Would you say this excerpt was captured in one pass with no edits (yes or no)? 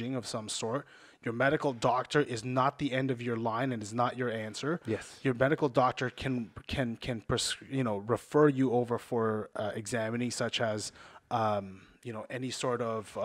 yes